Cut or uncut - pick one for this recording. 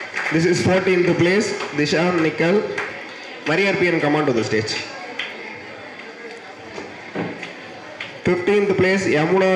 uncut